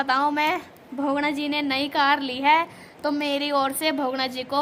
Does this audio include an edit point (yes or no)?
no